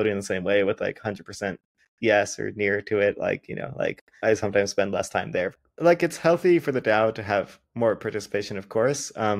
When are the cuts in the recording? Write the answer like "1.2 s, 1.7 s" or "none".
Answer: 4.1 s, 5.6 s